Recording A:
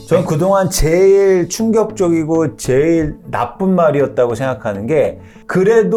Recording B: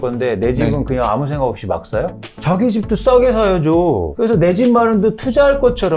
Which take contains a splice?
B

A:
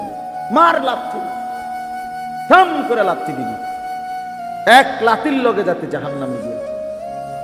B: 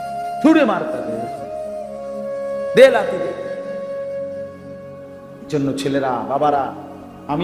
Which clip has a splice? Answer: A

